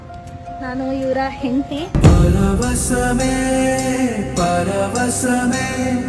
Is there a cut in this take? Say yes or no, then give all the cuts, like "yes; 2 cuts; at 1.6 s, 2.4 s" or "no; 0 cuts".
yes; 1 cut; at 1.8 s